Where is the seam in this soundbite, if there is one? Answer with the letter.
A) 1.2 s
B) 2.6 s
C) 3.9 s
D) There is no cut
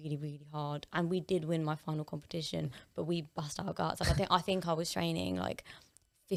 D